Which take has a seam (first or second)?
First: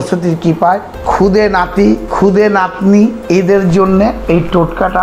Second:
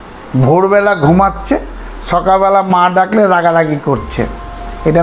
first